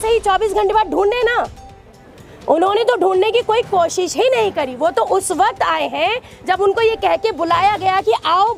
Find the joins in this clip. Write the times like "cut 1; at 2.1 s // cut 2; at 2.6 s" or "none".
none